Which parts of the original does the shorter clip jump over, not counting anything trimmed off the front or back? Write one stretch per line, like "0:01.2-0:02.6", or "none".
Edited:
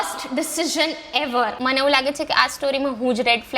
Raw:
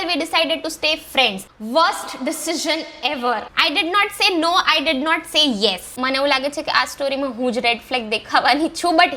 0:03.5-0:05.9